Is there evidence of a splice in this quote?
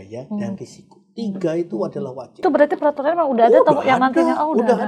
yes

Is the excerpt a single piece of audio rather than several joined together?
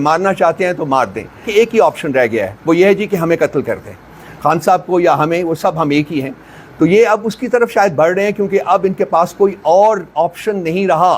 no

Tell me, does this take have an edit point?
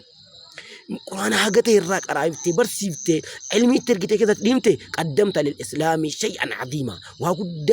yes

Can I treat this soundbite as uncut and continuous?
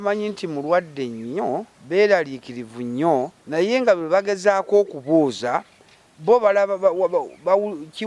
no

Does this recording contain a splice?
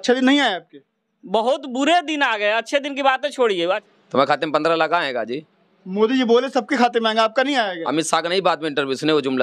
yes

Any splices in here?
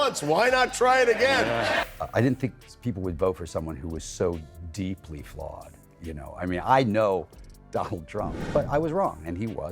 yes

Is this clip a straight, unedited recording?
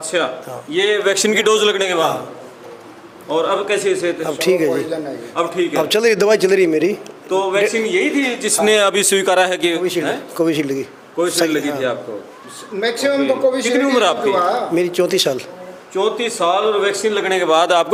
yes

